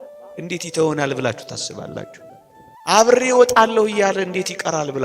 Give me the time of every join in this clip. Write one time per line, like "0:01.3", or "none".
0:02.2

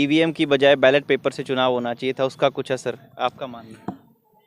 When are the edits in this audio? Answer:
none

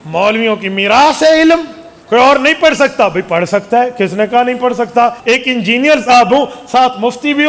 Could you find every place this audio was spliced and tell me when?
0:01.9
0:05.2

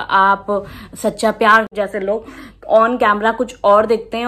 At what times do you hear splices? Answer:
0:01.7

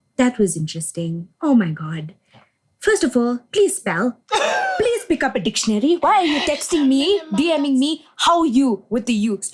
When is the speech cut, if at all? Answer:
none

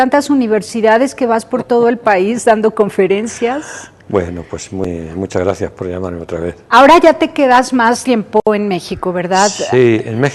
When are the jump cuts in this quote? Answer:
none

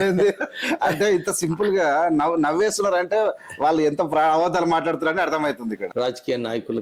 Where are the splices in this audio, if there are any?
0:05.8

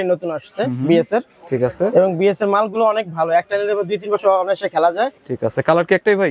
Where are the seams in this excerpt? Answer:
0:05.2

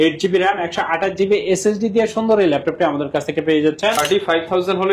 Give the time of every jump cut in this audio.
0:04.0

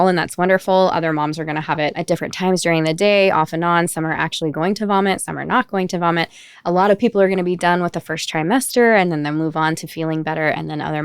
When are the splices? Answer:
0:02.0

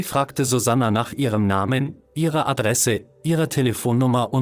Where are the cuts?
0:02.0

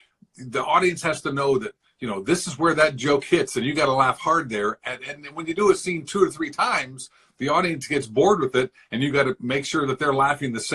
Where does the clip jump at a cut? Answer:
none

